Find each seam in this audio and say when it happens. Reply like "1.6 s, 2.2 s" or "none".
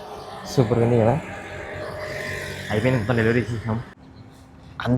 3.9 s